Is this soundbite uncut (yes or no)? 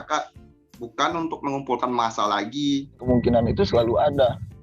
no